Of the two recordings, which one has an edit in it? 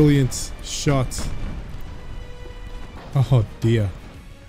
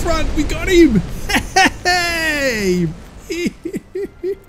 first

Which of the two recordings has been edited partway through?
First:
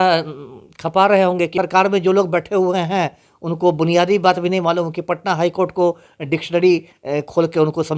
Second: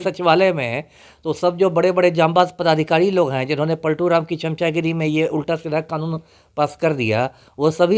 first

